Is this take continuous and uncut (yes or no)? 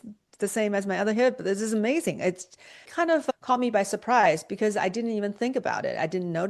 yes